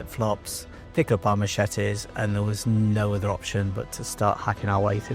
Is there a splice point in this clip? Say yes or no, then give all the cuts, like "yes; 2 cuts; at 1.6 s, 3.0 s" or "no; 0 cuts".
no; 0 cuts